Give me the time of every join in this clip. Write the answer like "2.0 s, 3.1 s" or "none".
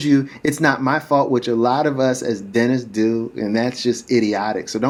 none